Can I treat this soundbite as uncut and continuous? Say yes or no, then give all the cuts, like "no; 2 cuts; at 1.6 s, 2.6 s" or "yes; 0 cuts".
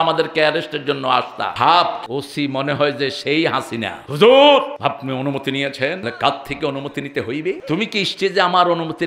no; 6 cuts; at 1.5 s, 2.0 s, 4.0 s, 4.7 s, 6.0 s, 7.6 s